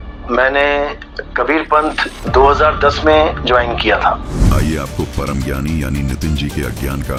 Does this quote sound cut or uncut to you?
uncut